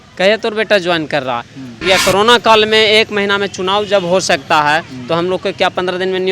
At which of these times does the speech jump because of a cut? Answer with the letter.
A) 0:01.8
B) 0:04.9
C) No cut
A